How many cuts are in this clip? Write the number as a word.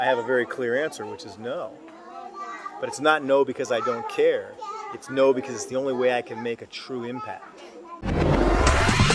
one